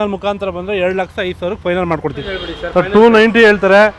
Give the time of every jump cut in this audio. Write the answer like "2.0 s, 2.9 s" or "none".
2.2 s